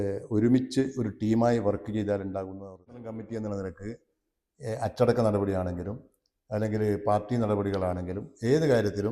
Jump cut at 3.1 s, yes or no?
yes